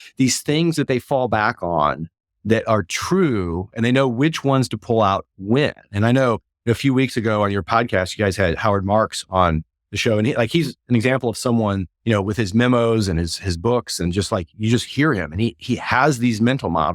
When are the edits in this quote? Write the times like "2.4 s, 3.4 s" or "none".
7.7 s, 11.9 s